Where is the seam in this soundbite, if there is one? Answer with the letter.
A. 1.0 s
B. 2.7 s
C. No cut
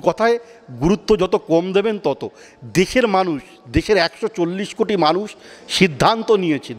C